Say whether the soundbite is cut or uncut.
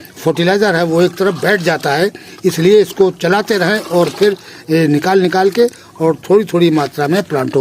uncut